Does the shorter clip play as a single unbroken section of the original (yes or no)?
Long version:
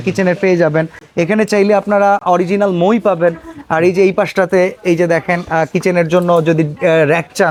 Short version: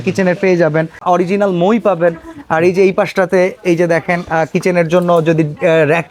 no